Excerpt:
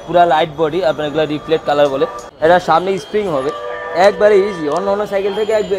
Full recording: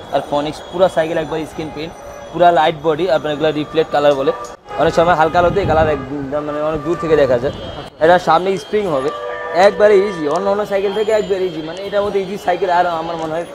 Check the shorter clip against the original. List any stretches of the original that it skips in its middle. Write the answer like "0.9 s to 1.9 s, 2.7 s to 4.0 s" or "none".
4.5 s to 7.8 s